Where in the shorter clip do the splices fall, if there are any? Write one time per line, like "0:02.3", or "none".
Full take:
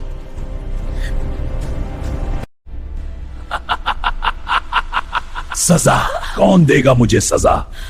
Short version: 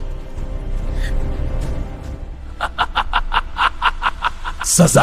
0:02.1